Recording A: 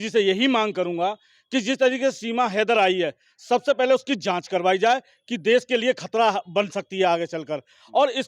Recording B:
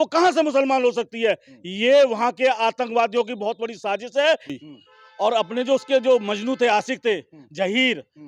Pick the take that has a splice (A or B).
B